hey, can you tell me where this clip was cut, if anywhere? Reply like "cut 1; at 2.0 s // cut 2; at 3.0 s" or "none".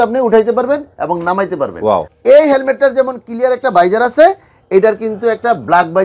cut 1; at 2.1 s